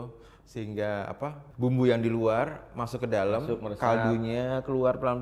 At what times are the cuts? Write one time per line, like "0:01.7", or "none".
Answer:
0:01.5